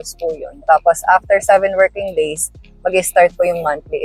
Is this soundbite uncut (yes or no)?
yes